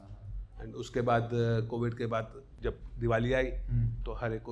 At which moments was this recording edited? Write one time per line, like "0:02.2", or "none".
0:02.4

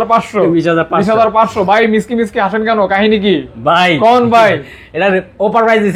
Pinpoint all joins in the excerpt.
none

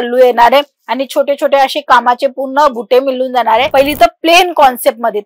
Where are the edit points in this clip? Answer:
0:03.7

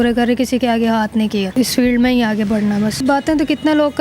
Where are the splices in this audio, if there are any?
0:01.5
0:03.0

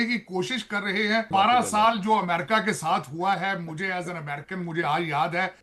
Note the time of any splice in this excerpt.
0:01.3

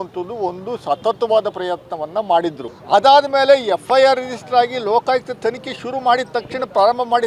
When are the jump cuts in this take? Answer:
0:02.7

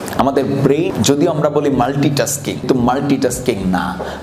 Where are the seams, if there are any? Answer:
0:00.9
0:02.7

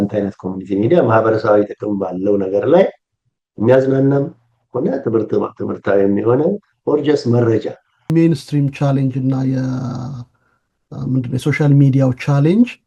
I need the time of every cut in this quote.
0:08.1

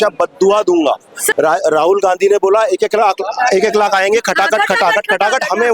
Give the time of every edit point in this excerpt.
0:01.2

